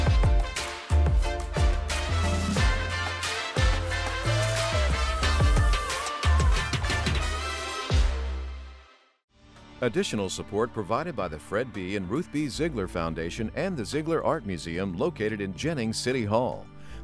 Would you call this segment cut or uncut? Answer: cut